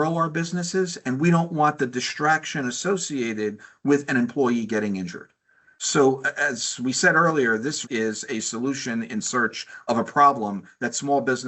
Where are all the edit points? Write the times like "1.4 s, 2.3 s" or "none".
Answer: 7.8 s